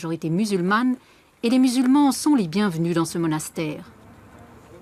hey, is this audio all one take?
yes; 0 cuts

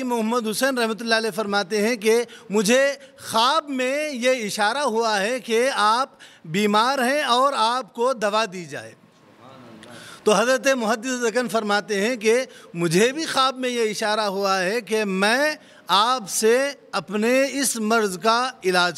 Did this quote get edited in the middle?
no; 0 cuts

